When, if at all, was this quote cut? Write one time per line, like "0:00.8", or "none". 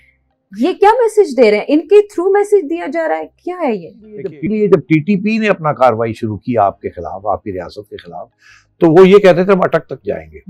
0:04.0